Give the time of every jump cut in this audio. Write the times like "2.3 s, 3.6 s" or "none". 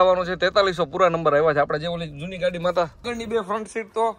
3.1 s